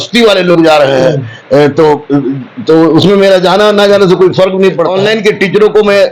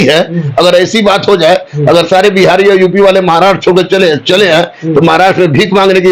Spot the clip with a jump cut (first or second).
first